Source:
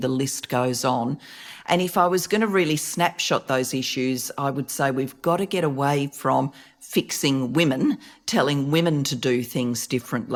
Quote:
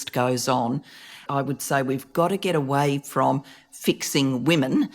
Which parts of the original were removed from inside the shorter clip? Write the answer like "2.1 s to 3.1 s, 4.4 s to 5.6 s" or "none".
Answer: 1.6 s to 4.3 s